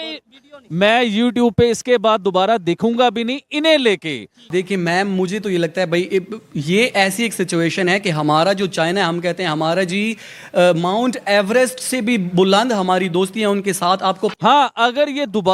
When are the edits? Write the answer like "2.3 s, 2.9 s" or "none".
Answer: 4.5 s, 14.3 s